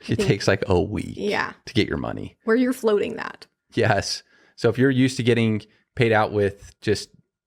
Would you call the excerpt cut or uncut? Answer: uncut